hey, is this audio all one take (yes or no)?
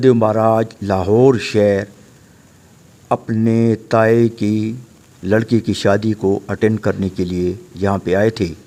yes